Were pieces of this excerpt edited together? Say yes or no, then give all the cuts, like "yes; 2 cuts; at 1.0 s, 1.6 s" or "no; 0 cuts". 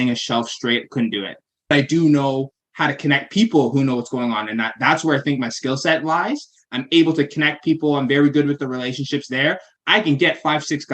yes; 1 cut; at 1.7 s